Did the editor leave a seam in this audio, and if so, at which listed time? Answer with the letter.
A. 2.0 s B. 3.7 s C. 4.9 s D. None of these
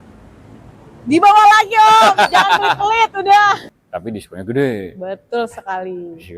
B